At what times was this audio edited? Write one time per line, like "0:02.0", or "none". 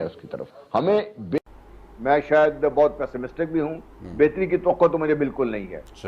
0:01.4